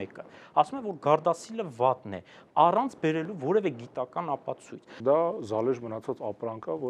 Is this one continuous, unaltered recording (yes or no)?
no